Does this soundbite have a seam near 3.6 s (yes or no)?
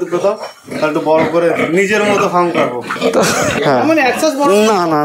yes